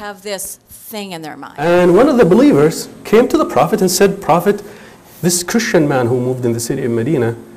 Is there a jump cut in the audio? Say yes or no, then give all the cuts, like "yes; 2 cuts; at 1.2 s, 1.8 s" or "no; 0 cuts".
yes; 1 cut; at 1.4 s